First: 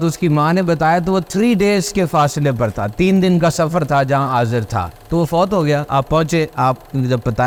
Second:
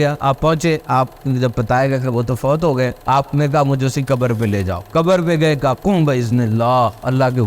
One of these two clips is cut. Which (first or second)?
second